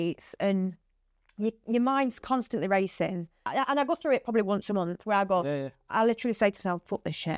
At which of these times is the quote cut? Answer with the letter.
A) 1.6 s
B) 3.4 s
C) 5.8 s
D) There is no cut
B